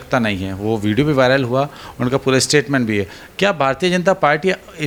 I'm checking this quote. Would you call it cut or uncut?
uncut